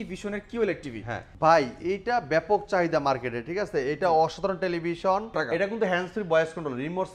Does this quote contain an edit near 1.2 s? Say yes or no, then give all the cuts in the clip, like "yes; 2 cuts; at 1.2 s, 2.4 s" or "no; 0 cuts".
yes; 2 cuts; at 1.2 s, 5.3 s